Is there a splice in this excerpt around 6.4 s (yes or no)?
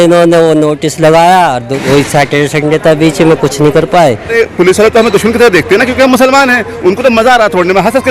no